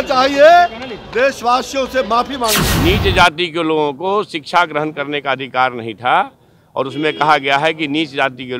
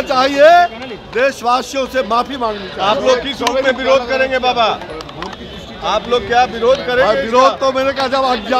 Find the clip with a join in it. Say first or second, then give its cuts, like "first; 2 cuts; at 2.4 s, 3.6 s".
first; 1 cut; at 2.7 s